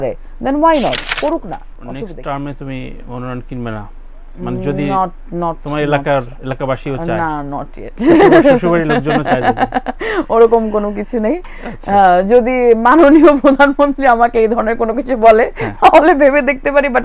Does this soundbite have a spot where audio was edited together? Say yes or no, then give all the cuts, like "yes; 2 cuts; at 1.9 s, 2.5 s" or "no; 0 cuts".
yes; 1 cut; at 1.7 s